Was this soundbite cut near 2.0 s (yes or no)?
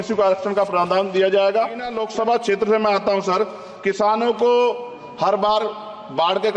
yes